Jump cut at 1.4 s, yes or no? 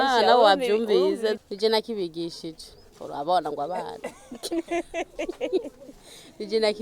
yes